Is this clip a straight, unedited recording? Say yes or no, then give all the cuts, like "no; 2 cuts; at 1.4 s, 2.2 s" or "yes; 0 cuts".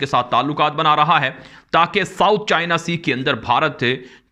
yes; 0 cuts